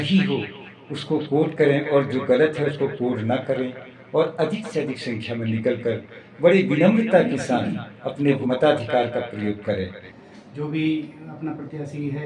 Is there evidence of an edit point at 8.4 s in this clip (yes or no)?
yes